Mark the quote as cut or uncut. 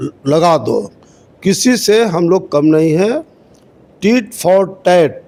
uncut